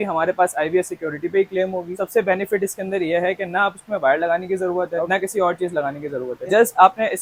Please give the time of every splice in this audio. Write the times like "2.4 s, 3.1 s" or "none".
none